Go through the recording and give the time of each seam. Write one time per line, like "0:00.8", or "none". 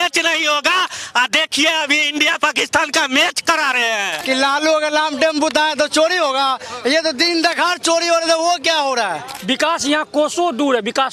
0:04.1
0:09.3